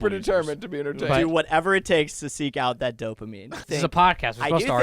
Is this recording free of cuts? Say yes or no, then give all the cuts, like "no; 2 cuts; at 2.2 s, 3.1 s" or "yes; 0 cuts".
no; 1 cut; at 3.6 s